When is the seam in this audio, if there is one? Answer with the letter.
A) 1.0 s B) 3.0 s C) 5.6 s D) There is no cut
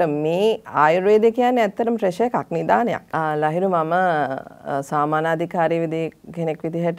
B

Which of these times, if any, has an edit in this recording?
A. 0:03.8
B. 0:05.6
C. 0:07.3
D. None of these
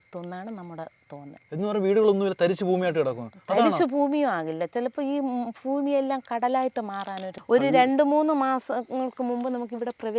C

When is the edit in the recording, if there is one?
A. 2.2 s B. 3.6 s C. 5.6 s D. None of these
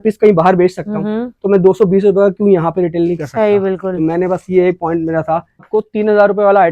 C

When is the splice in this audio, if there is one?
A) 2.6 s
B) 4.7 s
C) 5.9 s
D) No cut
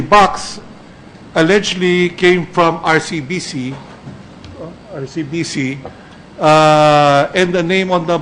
D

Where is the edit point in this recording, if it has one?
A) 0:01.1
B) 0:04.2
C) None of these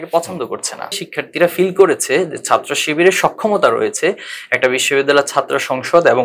A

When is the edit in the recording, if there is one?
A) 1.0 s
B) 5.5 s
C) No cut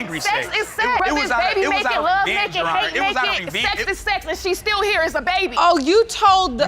B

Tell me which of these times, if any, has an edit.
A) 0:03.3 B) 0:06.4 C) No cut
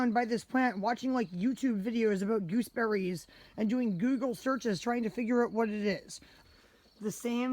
B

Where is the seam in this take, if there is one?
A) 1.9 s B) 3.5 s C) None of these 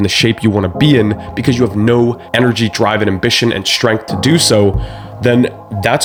C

